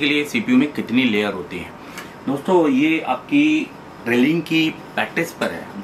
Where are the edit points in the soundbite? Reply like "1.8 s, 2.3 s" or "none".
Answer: none